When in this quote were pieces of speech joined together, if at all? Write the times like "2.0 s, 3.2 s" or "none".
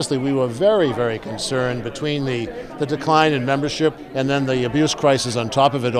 4.0 s

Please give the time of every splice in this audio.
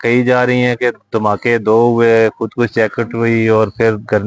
none

